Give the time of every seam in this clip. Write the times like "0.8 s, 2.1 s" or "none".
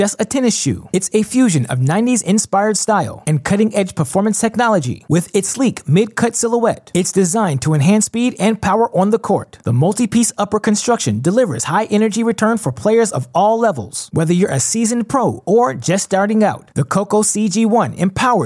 none